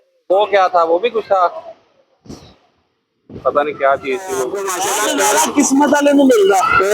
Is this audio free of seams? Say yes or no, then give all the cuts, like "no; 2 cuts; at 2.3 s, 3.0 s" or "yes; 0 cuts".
no; 1 cut; at 4.8 s